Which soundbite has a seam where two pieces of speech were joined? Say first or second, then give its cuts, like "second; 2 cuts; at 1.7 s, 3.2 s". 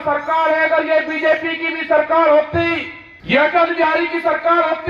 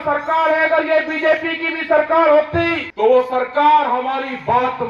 second; 1 cut; at 2.8 s